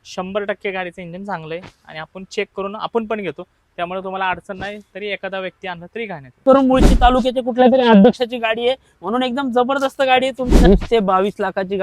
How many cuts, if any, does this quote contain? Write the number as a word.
two